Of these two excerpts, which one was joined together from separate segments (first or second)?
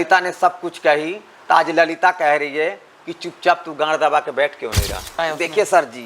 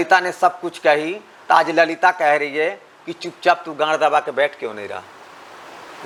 first